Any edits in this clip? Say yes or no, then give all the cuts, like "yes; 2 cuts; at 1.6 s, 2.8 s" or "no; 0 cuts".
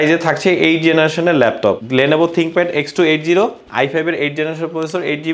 yes; 1 cut; at 1.8 s